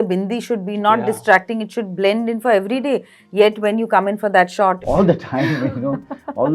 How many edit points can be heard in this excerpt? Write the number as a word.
one